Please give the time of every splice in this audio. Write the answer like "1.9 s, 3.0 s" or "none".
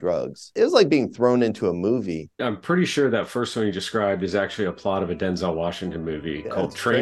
2.2 s